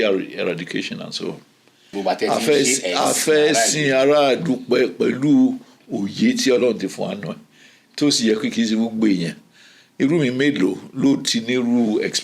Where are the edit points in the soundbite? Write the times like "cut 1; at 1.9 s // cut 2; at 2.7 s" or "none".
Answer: cut 1; at 1.9 s